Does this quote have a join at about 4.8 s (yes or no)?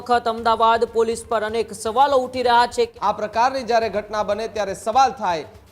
no